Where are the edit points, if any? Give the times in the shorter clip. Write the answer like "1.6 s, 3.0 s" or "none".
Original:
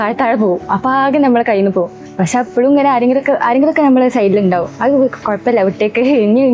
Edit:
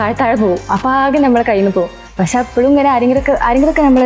none